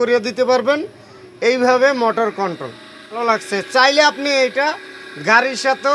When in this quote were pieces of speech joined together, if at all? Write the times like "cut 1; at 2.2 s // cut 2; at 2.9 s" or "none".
cut 1; at 3.2 s

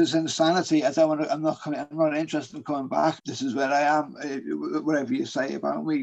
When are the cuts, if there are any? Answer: cut 1; at 3.2 s

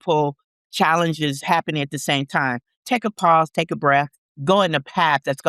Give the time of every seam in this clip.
cut 1; at 4.2 s

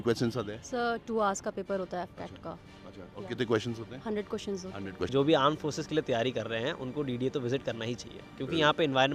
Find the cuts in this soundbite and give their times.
cut 1; at 5.1 s

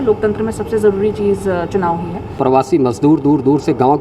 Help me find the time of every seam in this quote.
cut 1; at 2.4 s

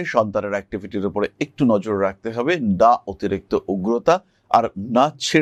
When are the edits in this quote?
none

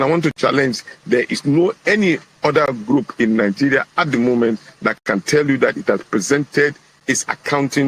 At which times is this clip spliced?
cut 1; at 3.3 s

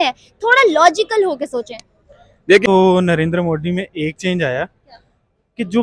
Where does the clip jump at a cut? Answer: cut 1; at 2.6 s

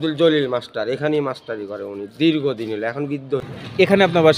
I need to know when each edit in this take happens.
cut 1; at 3.4 s

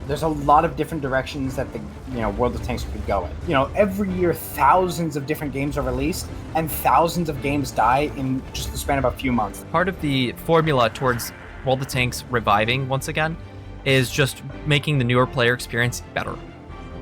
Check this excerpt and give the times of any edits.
cut 1; at 3.4 s // cut 2; at 8.6 s // cut 3; at 9.6 s

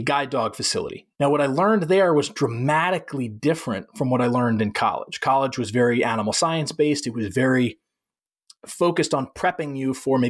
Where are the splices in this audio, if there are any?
cut 1; at 1.0 s

